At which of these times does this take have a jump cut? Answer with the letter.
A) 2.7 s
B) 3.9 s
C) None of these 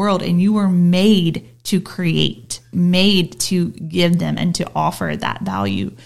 A